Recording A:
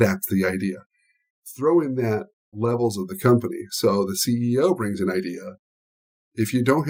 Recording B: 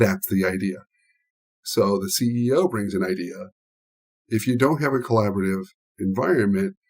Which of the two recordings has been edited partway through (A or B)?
B